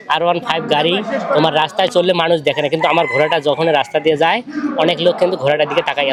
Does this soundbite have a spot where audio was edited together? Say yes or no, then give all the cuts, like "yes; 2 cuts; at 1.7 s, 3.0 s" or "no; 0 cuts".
no; 0 cuts